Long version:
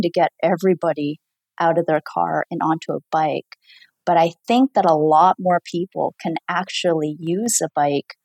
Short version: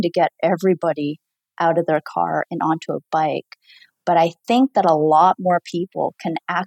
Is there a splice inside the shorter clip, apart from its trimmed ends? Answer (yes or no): no